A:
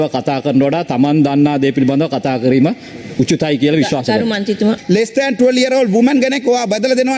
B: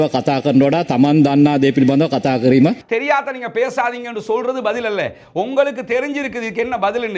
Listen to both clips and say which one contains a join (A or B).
B